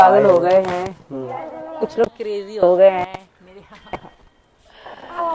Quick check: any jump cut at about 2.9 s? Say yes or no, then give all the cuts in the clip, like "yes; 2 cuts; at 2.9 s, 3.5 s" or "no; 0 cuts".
no; 0 cuts